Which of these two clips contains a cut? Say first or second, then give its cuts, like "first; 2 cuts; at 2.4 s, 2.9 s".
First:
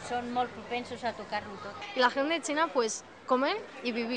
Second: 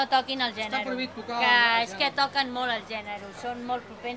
first; 1 cut; at 1.8 s